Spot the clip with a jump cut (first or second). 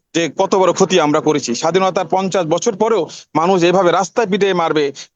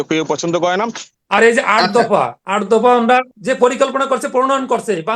second